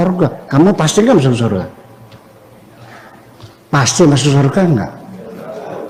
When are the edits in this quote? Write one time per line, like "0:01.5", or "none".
none